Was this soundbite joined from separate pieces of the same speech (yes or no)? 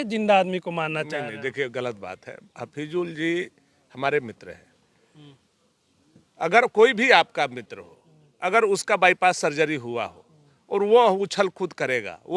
no